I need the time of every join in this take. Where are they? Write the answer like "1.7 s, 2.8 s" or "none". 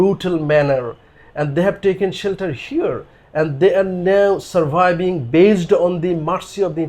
none